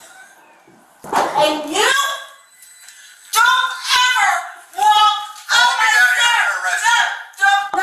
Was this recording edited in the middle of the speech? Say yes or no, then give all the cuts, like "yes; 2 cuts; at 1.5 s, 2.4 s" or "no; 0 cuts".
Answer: yes; 1 cut; at 0.9 s